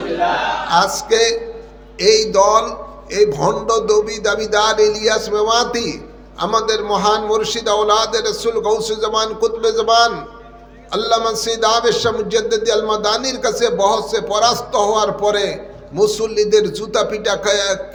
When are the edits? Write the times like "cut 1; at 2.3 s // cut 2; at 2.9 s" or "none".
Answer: none